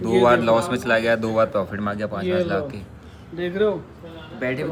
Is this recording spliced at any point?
no; 0 cuts

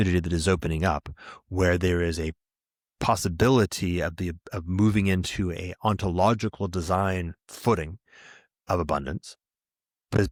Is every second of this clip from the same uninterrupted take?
yes; 0 cuts

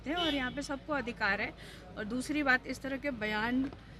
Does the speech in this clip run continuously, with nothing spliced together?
yes; 0 cuts

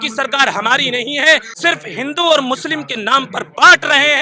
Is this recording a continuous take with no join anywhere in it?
no; 1 cut; at 1.5 s

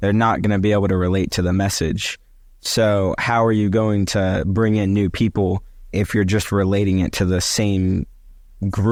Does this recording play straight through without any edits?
yes; 0 cuts

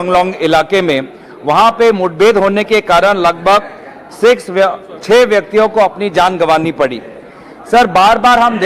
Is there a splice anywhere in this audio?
yes; 1 cut; at 2.9 s

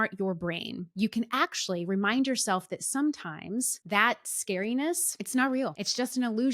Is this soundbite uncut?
no; 1 cut; at 5.5 s

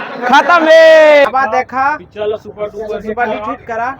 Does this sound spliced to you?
yes; 1 cut; at 1.3 s

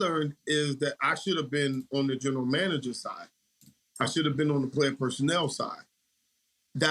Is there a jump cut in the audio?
no; 0 cuts

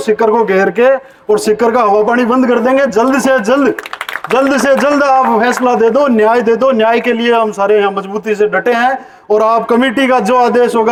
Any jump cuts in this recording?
no; 0 cuts

